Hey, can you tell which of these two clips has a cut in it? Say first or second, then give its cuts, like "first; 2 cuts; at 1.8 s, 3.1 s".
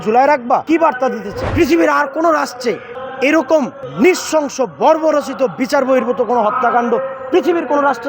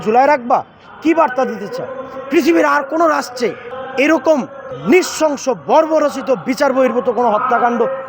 first; 2 cuts; at 0.9 s, 3.8 s